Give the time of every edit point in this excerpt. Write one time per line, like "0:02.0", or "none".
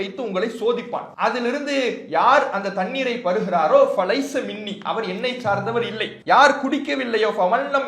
0:01.1
0:06.1